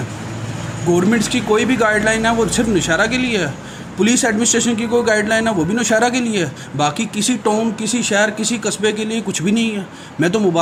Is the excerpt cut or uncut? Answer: uncut